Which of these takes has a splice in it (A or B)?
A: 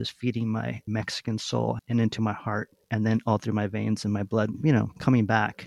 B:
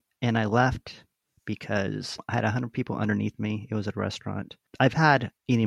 A